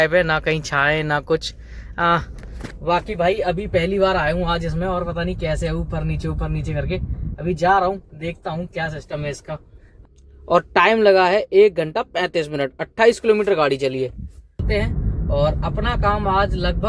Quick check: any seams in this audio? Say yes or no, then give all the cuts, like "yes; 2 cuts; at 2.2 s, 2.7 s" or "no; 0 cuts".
yes; 2 cuts; at 10.0 s, 14.6 s